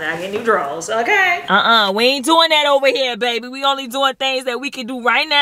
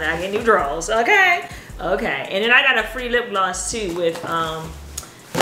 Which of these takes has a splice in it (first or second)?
first